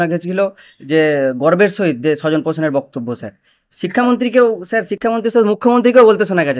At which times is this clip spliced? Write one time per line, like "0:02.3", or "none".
none